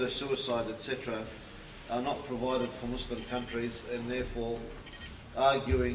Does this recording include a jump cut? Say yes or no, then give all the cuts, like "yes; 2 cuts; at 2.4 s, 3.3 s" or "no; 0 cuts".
no; 0 cuts